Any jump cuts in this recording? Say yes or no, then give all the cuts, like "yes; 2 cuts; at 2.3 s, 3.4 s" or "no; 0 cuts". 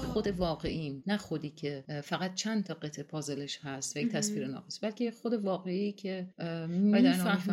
no; 0 cuts